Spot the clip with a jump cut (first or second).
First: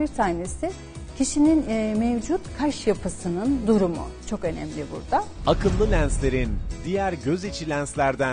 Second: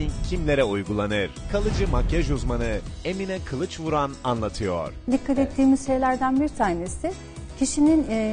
first